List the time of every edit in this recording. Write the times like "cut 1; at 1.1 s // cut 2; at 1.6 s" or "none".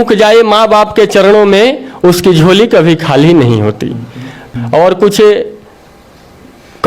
cut 1; at 4.4 s